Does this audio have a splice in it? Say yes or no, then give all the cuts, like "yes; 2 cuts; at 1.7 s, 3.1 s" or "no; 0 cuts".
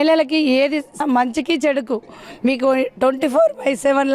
yes; 1 cut; at 1.0 s